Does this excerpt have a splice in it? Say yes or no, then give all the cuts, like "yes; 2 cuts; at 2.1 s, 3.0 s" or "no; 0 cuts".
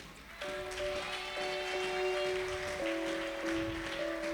no; 0 cuts